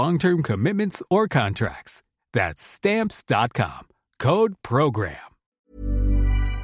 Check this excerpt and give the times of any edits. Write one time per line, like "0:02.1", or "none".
0:05.6